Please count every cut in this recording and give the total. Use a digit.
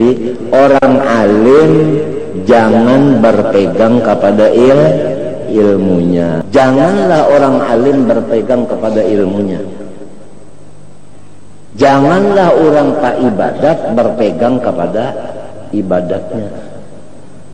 1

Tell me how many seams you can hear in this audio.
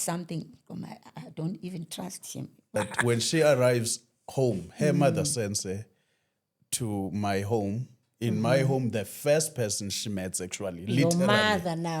1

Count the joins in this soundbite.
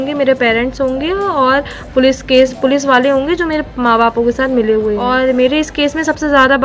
1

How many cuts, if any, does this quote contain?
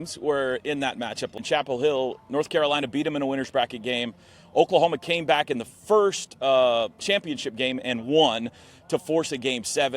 1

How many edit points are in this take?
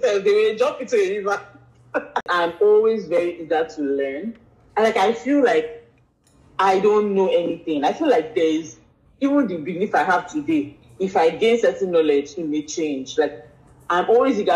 1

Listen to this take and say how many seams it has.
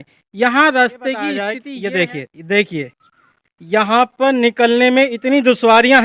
1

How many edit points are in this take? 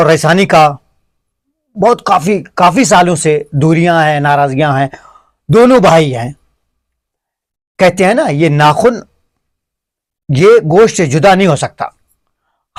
0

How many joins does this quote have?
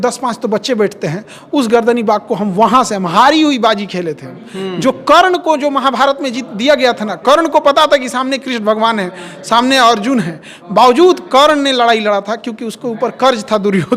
0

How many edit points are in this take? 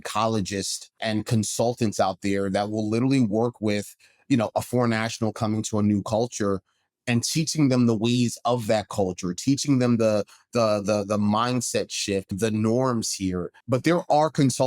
3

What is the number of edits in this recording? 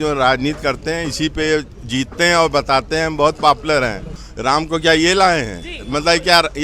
1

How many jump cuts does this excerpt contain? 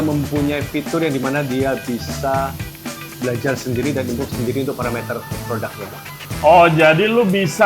1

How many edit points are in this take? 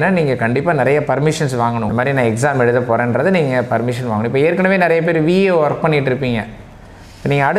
1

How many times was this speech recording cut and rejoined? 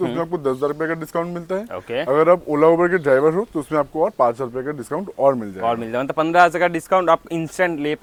0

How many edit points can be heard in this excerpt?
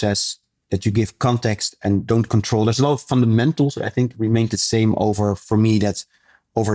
0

